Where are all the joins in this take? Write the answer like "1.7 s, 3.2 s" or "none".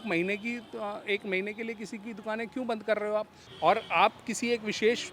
3.4 s

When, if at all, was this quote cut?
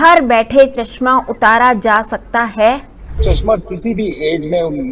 3.2 s

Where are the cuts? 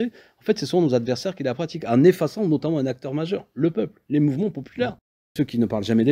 5.1 s

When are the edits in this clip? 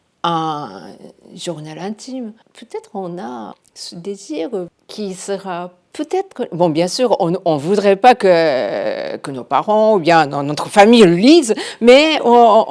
2.5 s, 3.6 s, 4.7 s

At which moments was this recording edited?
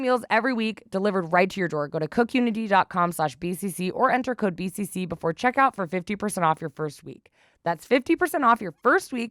none

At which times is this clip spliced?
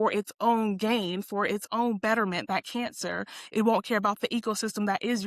none

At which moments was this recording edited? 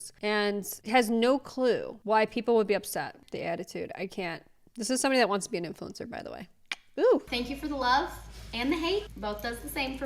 3.2 s, 7.3 s, 9.1 s

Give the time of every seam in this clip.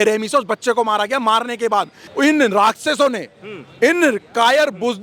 2.0 s

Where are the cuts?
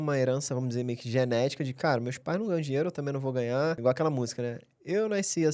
3.8 s

